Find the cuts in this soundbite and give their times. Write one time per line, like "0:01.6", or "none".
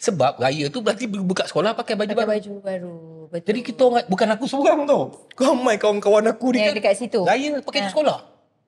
none